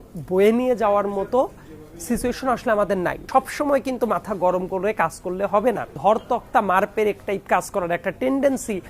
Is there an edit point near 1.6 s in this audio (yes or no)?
no